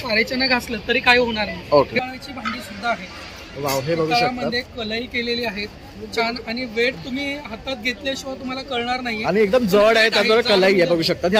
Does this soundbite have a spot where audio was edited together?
yes; 1 cut; at 2.0 s

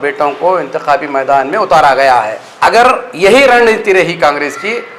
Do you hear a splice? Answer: yes; 1 cut; at 2.4 s

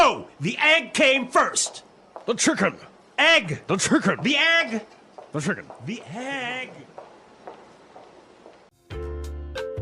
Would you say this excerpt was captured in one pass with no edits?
no; 1 cut; at 8.7 s

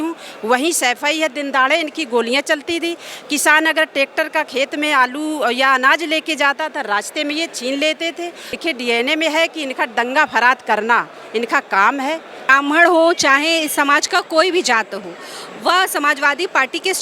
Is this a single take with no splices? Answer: no; 2 cuts; at 8.6 s, 12.5 s

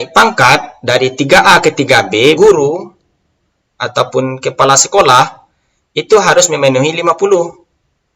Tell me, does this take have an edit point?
yes; 1 cut; at 2.4 s

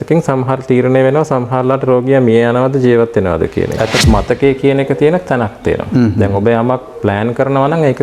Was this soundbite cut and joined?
yes; 1 cut; at 4.0 s

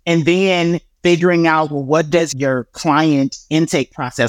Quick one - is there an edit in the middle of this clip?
no; 0 cuts

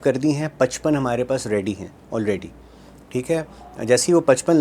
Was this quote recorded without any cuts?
yes; 0 cuts

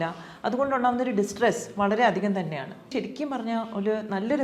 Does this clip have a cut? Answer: yes; 1 cut; at 2.9 s

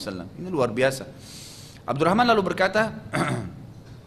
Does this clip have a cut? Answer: no; 0 cuts

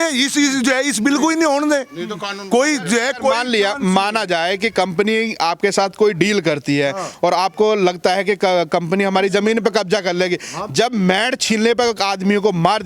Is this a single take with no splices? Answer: yes; 0 cuts

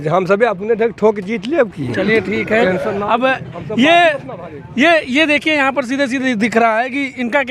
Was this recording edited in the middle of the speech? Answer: no; 0 cuts

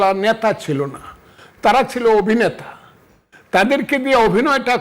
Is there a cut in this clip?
no; 0 cuts

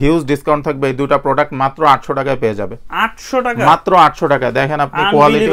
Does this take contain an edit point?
no; 0 cuts

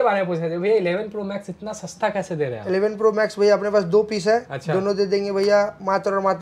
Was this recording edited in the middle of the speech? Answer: no; 0 cuts

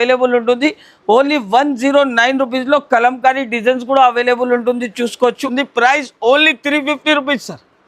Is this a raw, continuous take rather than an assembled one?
no; 1 cut; at 5.5 s

